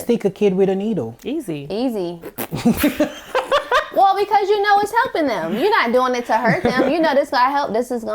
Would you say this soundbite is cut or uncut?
uncut